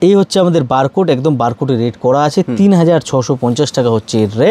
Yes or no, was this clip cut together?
no